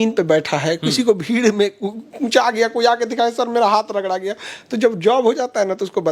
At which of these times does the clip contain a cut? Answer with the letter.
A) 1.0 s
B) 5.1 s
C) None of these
C